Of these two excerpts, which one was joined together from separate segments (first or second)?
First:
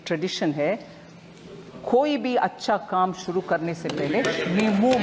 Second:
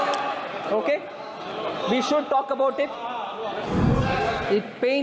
second